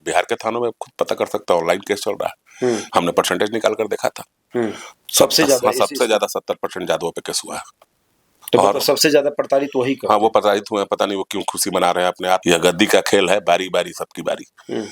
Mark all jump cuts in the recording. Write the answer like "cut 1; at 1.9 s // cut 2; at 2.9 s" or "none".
cut 1; at 12.4 s